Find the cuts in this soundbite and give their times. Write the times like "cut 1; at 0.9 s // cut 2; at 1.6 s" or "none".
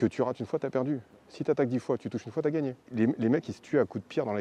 cut 1; at 2.8 s